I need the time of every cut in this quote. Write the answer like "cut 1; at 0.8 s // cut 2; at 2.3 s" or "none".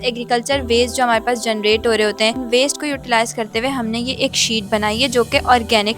cut 1; at 2.4 s